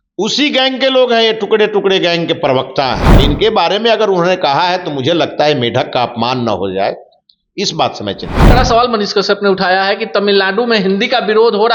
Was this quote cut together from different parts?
yes; 2 cuts; at 3.1 s, 8.4 s

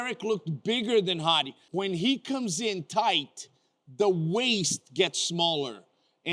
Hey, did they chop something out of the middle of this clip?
yes; 1 cut; at 1.6 s

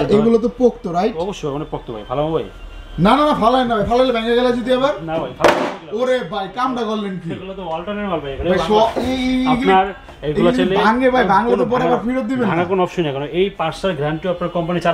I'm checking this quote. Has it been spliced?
no; 0 cuts

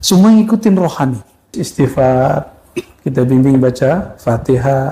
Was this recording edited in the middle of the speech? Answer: yes; 1 cut; at 1.6 s

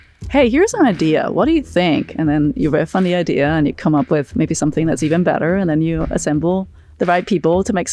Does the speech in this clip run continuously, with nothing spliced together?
no; 1 cut; at 6.8 s

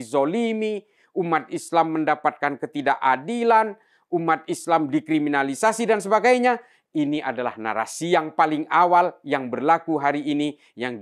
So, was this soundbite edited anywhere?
no; 0 cuts

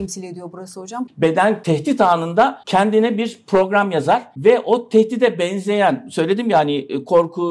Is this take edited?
yes; 4 cuts; at 0.9 s, 1.6 s, 2.6 s, 4.3 s

